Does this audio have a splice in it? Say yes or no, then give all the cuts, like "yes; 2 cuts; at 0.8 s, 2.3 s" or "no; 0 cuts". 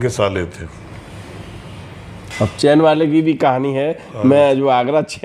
no; 0 cuts